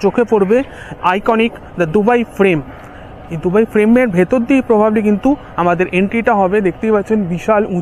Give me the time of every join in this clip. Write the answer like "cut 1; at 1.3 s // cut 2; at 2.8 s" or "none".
none